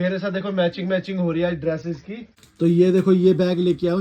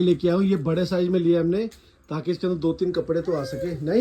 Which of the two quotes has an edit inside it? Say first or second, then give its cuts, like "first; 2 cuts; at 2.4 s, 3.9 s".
first; 1 cut; at 2.4 s